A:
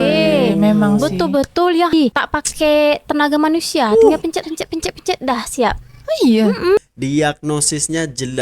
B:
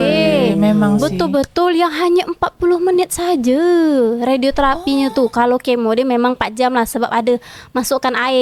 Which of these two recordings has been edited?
A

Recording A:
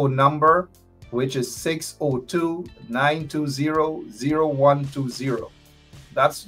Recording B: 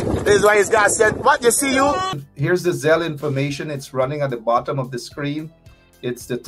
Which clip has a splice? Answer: B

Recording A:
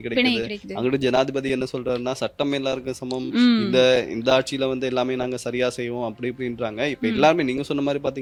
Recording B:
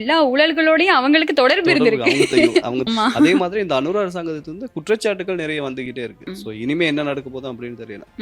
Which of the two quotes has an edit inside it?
B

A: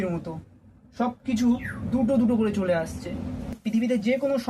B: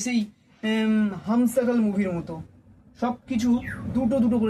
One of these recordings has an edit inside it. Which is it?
A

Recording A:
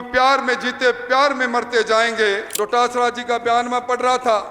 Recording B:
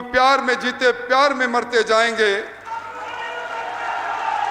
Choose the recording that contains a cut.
A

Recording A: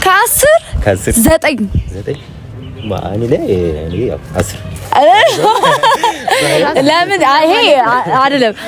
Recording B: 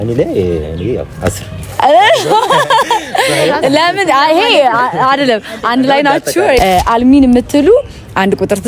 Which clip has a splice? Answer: B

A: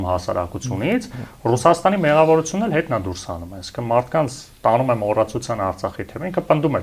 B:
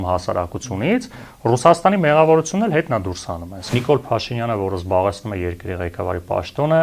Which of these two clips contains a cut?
B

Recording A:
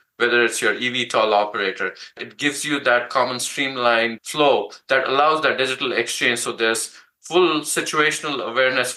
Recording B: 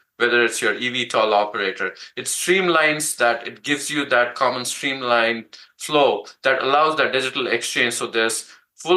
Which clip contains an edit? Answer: A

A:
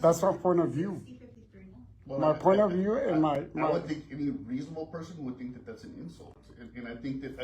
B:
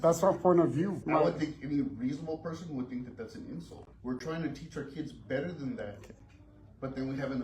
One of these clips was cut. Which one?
B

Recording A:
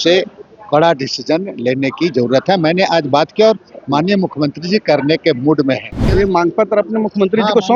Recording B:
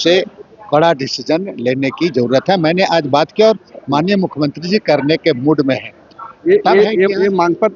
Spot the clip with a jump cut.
A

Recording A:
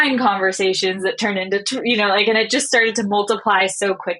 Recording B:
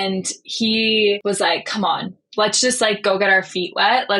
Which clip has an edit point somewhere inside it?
B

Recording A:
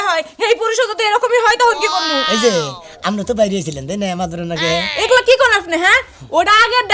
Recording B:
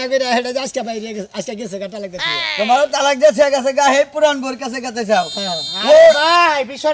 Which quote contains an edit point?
A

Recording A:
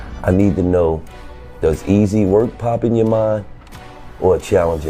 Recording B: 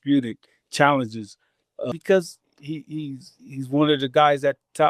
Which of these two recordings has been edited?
B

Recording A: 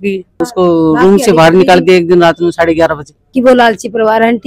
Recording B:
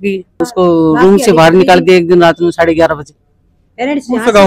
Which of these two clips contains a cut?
A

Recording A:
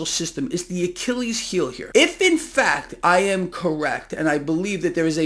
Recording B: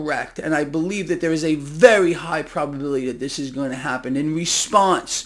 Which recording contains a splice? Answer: A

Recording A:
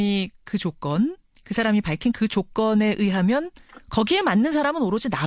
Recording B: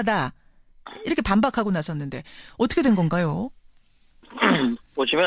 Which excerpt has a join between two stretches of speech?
B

